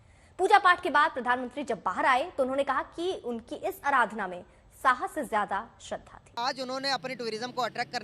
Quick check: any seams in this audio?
yes; 1 cut; at 6.3 s

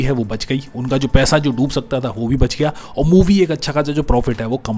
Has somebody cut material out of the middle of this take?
no; 0 cuts

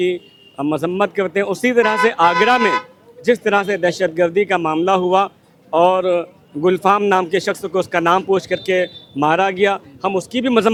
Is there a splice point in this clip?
no; 0 cuts

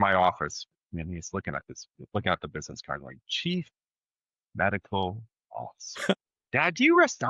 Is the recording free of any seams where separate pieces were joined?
no; 1 cut; at 6.1 s

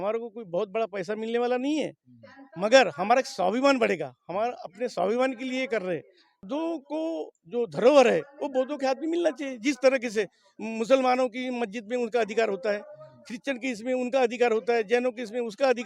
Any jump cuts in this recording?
yes; 1 cut; at 6.5 s

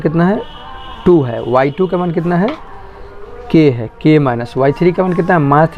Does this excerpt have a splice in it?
no; 0 cuts

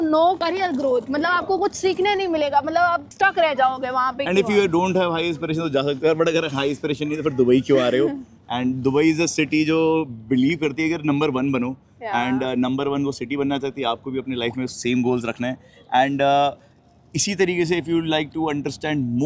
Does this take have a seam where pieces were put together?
no; 0 cuts

